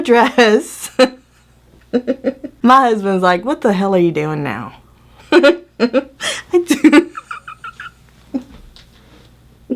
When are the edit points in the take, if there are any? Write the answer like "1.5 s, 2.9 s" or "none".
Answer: 2.5 s